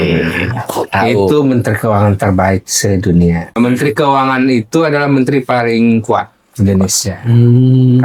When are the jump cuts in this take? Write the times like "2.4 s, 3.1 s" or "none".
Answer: 3.5 s